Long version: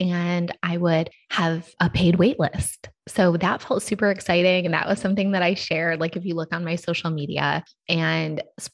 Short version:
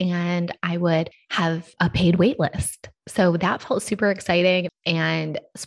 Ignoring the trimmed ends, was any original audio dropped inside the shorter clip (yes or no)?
yes